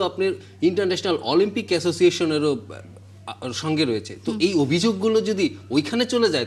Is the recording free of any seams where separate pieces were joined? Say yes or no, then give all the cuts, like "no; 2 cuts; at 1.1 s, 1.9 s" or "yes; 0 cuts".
yes; 0 cuts